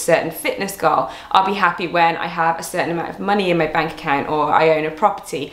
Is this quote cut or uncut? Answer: uncut